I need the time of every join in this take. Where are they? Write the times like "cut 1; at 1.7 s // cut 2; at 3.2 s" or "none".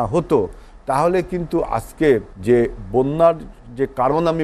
cut 1; at 2.3 s